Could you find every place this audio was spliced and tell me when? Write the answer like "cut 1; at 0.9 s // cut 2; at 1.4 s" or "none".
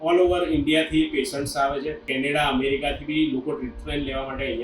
cut 1; at 2.1 s